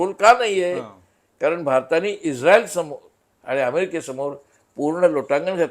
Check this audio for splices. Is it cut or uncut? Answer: uncut